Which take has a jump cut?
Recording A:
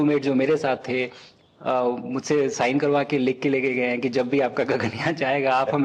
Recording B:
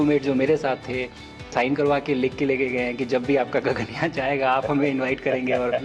B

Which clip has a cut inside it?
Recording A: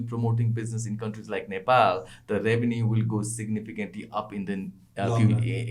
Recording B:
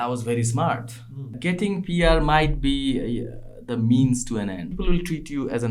B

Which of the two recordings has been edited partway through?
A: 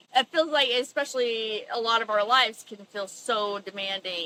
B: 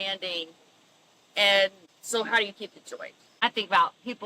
B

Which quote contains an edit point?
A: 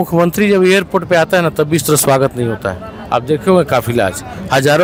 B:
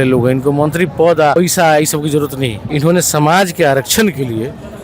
B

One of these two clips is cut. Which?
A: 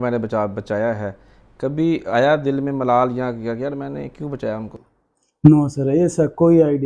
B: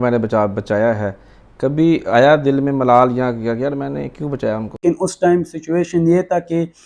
B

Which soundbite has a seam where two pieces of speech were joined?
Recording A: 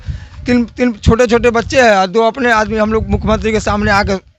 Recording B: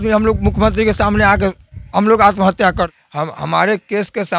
B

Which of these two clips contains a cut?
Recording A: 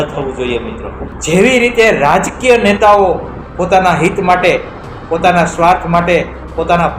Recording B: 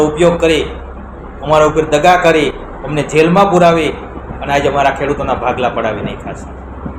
A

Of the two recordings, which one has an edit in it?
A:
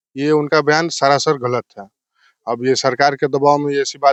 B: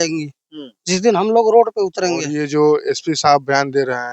B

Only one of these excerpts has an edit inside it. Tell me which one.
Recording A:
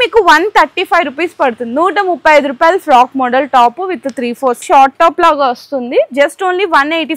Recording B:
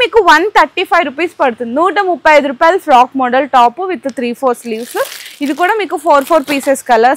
A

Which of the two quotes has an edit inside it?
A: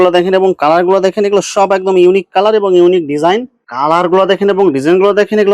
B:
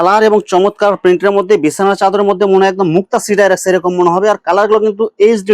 A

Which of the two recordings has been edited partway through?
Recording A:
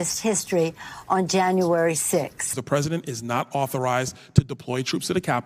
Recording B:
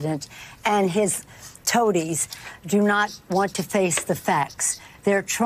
A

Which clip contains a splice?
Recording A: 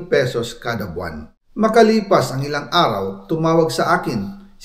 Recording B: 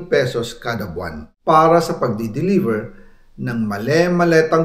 B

